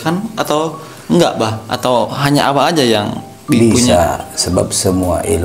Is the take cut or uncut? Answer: uncut